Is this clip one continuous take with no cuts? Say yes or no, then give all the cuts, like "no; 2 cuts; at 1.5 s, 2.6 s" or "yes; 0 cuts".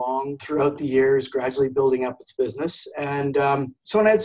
yes; 0 cuts